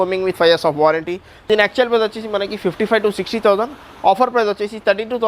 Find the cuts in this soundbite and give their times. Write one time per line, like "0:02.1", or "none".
0:01.5